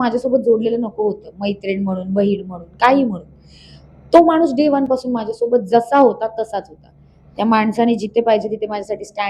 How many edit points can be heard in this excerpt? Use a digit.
0